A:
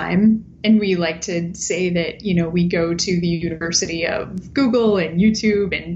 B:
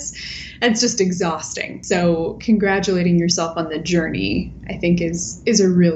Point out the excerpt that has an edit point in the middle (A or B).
B